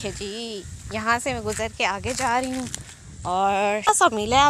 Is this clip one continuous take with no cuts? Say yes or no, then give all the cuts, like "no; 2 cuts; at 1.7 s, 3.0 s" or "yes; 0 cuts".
yes; 0 cuts